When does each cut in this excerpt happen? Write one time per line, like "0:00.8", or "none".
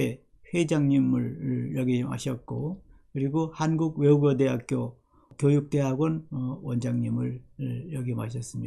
0:05.3